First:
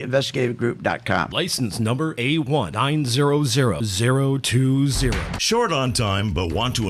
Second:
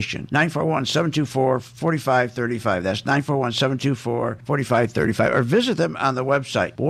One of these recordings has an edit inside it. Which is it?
first; 1 cut; at 5.2 s

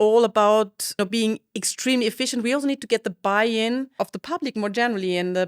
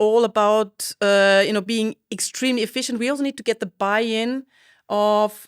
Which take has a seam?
first; 2 cuts; at 1.0 s, 4.0 s

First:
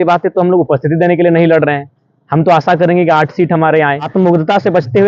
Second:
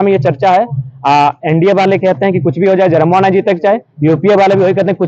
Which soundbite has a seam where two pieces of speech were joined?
first; 1 cut; at 4.0 s

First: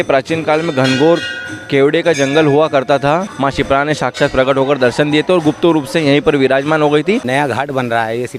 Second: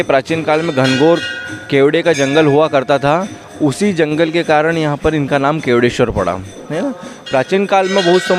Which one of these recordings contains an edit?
first; 2 cuts; at 3.3 s, 7.3 s

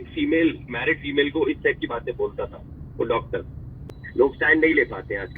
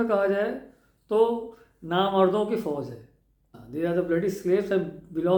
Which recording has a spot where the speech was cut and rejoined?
first; 1 cut; at 3.9 s

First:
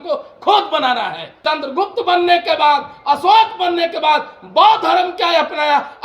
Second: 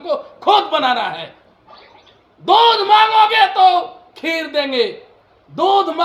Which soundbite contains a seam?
first; 1 cut; at 1.2 s

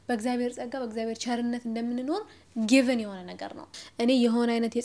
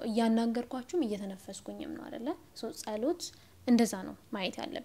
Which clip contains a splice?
first; 1 cut; at 3.8 s

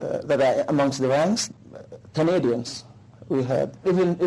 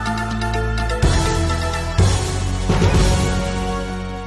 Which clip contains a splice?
first; 1 cut; at 1.4 s

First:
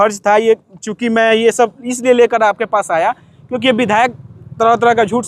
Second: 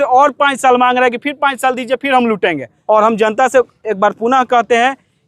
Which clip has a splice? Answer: second; 1 cut; at 2.7 s

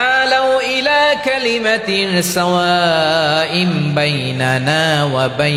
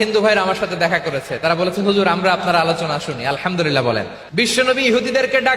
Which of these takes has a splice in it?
second; 1 cut; at 4.2 s

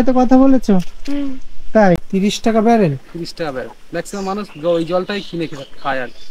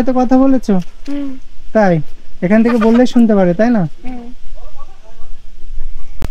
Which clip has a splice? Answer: first; 1 cut; at 2.0 s

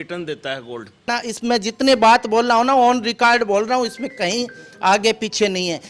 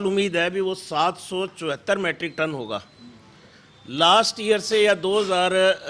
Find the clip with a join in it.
first; 1 cut; at 1.1 s

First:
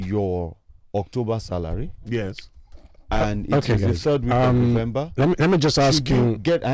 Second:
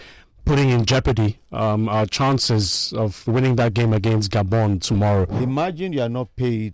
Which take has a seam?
second; 1 cut; at 5.3 s

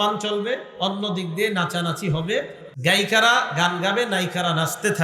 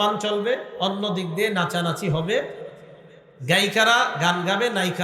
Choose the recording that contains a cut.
first; 1 cut; at 2.6 s

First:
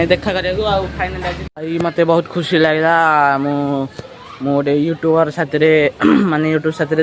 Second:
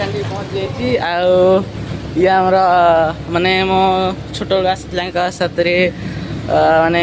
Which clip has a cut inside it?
first; 1 cut; at 1.5 s

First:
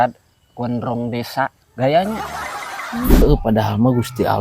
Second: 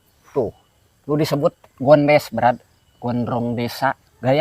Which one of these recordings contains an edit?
first; 1 cut; at 3.2 s

